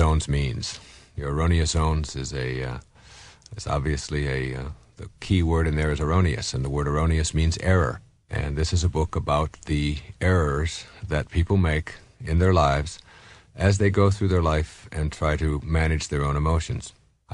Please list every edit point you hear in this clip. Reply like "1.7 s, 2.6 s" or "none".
16.0 s